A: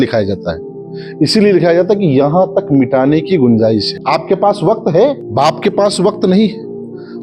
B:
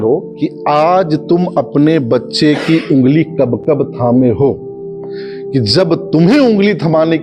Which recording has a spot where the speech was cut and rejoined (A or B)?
A